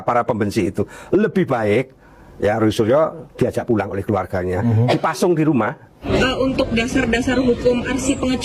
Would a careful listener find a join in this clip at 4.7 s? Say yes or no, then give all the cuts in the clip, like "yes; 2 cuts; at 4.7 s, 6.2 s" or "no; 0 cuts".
no; 1 cut; at 6.0 s